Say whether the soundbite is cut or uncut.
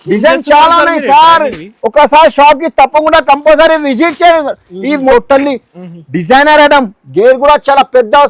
cut